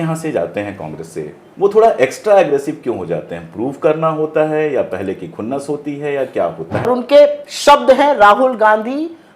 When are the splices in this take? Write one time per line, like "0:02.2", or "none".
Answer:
0:01.4
0:06.9